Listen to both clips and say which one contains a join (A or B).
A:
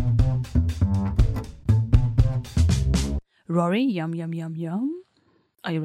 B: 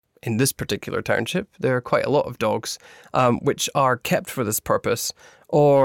A